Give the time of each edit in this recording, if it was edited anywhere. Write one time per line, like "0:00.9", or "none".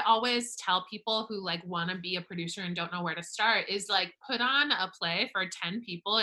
none